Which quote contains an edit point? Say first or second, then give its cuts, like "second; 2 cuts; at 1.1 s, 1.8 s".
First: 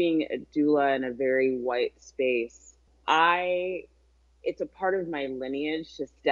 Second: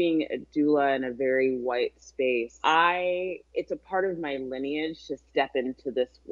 second; 2 cuts; at 2.5 s, 3.4 s